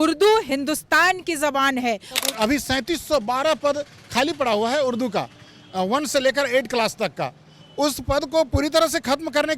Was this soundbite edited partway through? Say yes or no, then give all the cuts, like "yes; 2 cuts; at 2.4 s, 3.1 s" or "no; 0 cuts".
yes; 1 cut; at 2.1 s